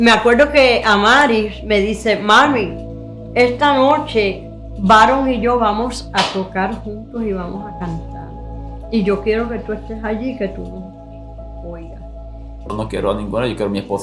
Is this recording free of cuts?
no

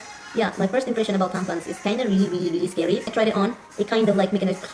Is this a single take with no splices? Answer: no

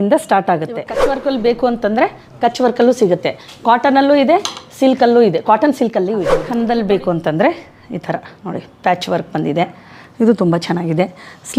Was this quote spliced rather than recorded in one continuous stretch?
yes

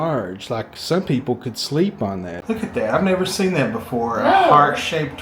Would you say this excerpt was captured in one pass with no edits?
no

